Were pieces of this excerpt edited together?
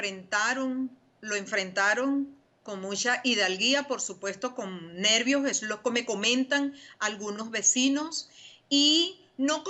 yes; 1 cut; at 1.1 s

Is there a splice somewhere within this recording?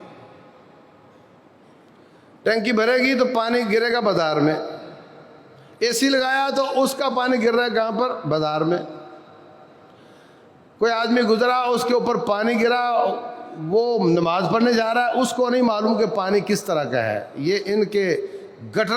no; 0 cuts

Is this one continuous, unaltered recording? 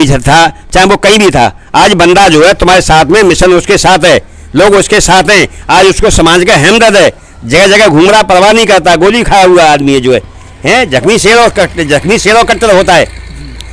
yes; 0 cuts

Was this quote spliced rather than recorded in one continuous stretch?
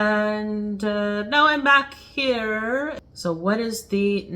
yes; 1 cut; at 3.0 s

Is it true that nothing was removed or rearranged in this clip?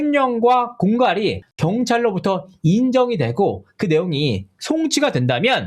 yes; 0 cuts

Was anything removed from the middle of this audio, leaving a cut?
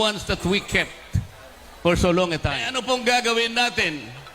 yes; 1 cut; at 2.7 s

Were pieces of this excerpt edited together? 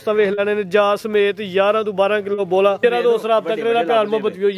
yes; 1 cut; at 2.8 s

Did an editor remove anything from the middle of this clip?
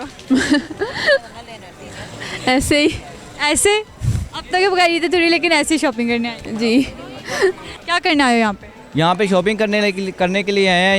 no; 0 cuts

